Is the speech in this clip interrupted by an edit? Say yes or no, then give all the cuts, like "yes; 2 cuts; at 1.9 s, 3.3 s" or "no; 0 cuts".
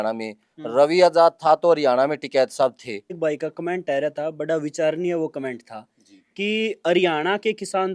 yes; 1 cut; at 3.2 s